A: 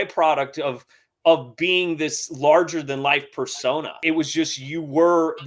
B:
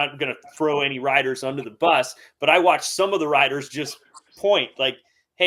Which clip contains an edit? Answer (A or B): A